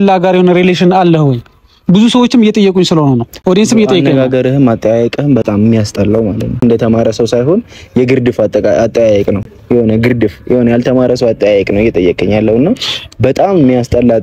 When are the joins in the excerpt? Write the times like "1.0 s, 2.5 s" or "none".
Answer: none

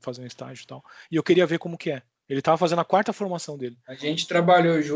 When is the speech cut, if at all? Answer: 4.0 s

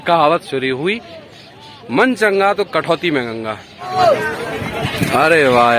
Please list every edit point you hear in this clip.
3.9 s

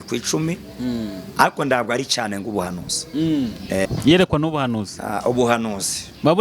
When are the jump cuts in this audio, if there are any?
3.9 s

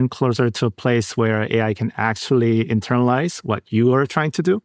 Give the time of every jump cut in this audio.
none

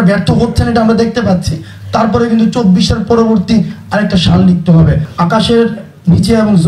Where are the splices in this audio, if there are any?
5.1 s

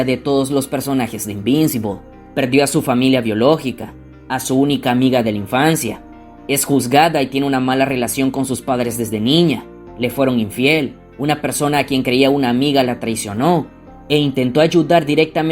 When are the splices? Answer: none

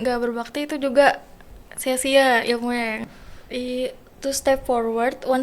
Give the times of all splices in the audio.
3.0 s

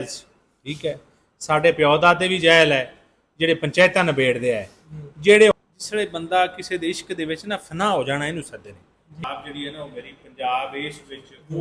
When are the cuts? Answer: 5.5 s, 9.2 s

